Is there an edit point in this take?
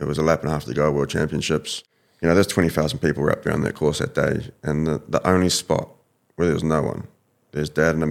yes; 1 cut; at 1.8 s

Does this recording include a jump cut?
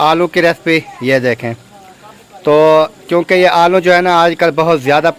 no; 0 cuts

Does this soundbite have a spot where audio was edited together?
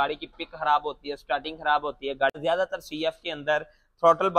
yes; 1 cut; at 2.4 s

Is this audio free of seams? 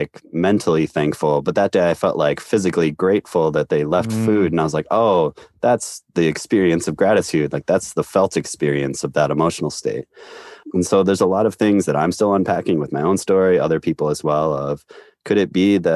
yes; 0 cuts

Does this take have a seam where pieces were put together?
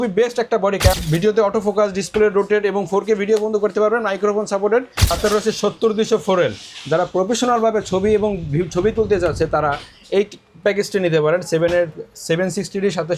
yes; 2 cuts; at 1.0 s, 5.0 s

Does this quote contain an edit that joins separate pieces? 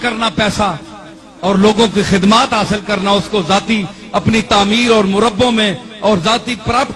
no; 0 cuts

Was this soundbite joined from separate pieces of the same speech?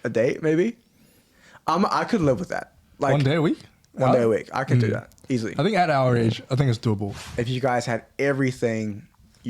yes; 1 cut; at 7.1 s

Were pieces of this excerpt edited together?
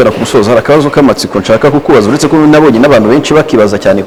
no; 0 cuts

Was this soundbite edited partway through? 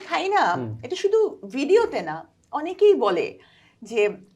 no; 0 cuts

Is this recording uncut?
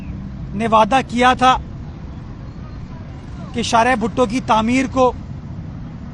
yes; 0 cuts

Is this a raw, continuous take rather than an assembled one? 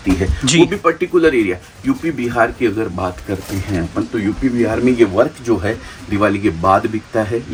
yes; 0 cuts

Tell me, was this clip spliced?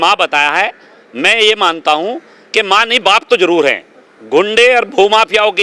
no; 0 cuts

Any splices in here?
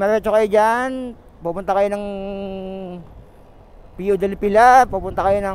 no; 0 cuts

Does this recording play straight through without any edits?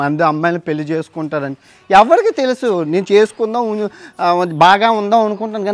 yes; 0 cuts

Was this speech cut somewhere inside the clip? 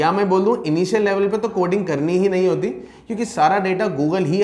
no; 0 cuts

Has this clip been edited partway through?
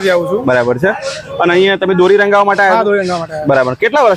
no; 0 cuts

